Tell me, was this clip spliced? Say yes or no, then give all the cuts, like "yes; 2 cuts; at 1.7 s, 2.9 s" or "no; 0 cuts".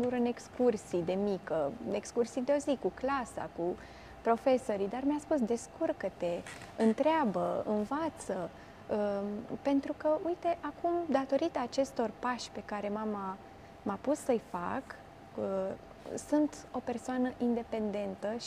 no; 0 cuts